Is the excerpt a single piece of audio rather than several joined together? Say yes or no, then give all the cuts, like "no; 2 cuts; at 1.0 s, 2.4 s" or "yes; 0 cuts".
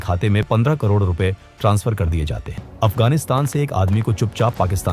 no; 1 cut; at 2.6 s